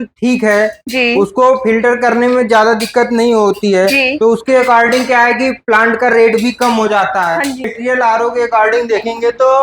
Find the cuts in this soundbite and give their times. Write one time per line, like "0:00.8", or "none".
0:07.7